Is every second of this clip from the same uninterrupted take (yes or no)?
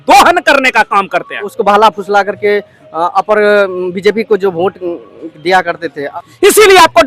no